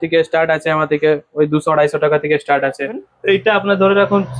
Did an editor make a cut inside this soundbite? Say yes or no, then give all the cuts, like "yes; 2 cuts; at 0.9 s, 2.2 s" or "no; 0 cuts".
yes; 1 cut; at 3.1 s